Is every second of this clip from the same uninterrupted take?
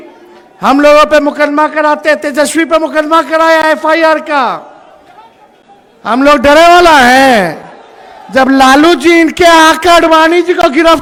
yes; 0 cuts

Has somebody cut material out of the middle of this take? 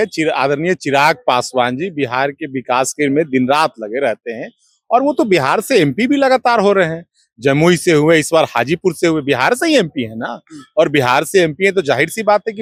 no; 0 cuts

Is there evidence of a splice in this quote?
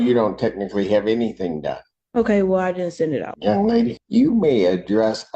yes; 2 cuts; at 3.3 s, 4.0 s

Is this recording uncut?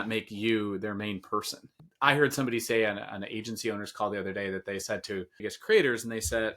no; 2 cuts; at 1.6 s, 5.5 s

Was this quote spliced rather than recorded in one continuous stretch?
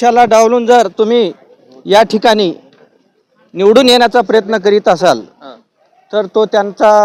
no; 0 cuts

